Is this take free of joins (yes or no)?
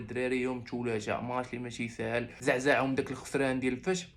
no